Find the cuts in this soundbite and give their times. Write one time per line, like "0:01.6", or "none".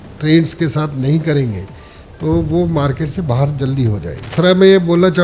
0:04.3